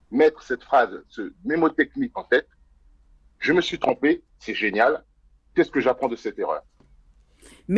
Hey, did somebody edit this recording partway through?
no; 0 cuts

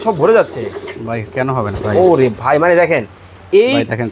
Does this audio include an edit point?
no; 0 cuts

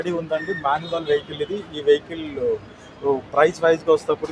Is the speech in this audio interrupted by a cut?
no; 0 cuts

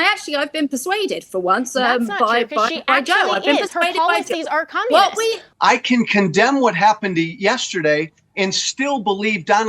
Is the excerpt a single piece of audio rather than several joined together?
no; 1 cut; at 5.5 s

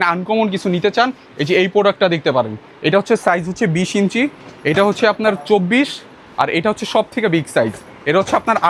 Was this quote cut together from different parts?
no; 0 cuts

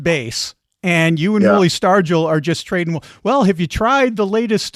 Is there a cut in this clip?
no; 0 cuts

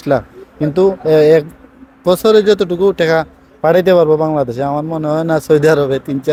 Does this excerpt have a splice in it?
no; 0 cuts

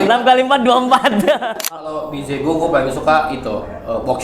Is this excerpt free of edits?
no; 1 cut; at 1.7 s

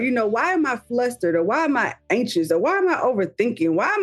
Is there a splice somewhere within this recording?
no; 0 cuts

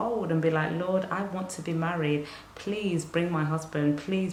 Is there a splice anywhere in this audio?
no; 0 cuts

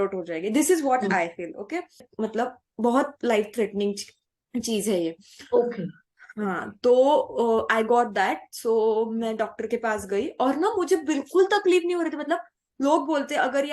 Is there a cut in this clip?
yes; 1 cut; at 2.1 s

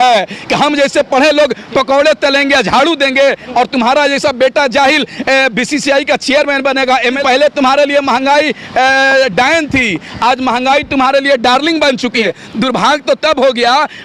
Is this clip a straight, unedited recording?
no; 2 cuts; at 7.2 s, 12.2 s

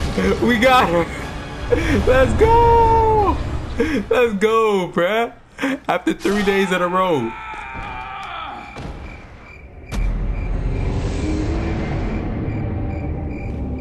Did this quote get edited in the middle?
no; 0 cuts

